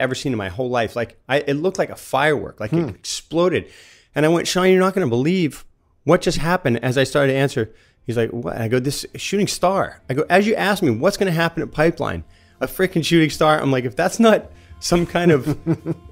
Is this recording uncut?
yes; 0 cuts

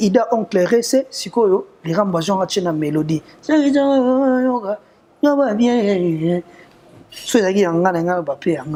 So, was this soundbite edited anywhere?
no; 0 cuts

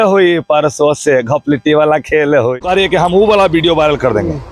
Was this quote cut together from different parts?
yes; 1 cut; at 2.6 s

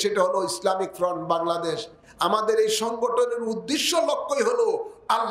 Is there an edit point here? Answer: no; 0 cuts

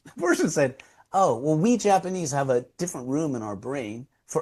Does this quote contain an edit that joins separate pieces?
no; 0 cuts

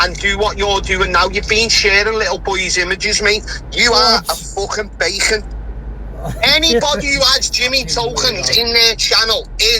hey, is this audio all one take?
no; 1 cut; at 2.4 s

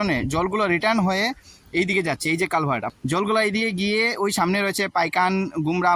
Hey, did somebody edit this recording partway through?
yes; 1 cut; at 2.9 s

